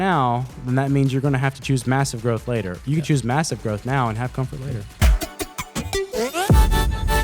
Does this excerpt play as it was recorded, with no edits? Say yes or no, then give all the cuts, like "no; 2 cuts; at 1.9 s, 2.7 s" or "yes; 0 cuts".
no; 1 cut; at 5.0 s